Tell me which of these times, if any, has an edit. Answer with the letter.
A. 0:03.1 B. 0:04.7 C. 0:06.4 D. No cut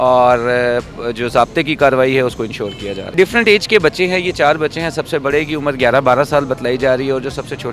A